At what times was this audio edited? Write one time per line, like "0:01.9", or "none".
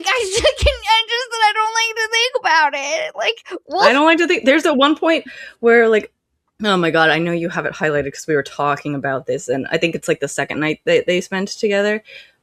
none